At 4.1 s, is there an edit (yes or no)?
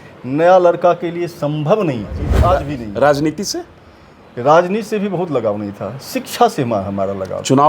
no